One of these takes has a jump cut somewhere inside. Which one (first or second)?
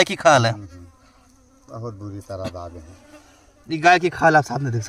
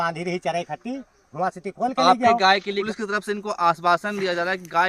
second